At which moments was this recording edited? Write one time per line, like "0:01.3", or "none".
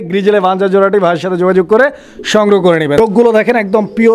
0:03.1